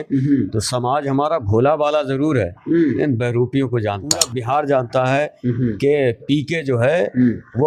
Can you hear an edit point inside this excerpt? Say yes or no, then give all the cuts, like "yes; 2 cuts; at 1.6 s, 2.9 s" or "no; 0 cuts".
yes; 1 cut; at 4.3 s